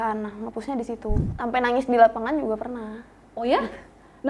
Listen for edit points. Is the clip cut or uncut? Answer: cut